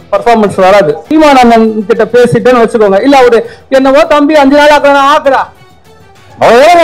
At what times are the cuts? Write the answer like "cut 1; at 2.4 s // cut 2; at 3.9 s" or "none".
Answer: cut 1; at 1.0 s